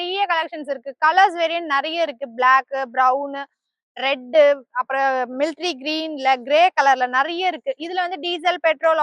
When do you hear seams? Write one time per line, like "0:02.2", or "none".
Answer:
none